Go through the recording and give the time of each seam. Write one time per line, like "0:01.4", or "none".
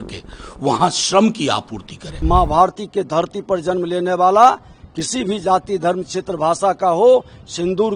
0:02.2